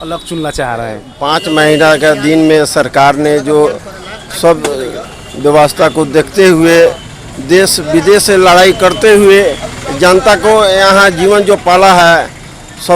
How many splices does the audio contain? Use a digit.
1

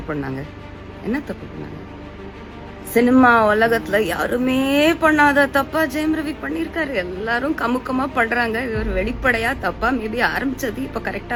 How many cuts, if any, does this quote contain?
0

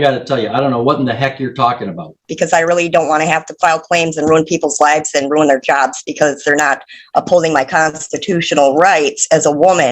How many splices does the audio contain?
1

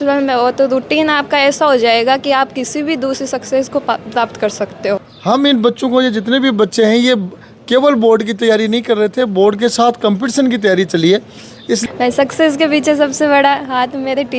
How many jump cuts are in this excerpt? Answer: 2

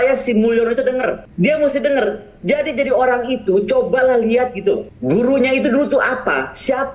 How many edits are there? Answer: 2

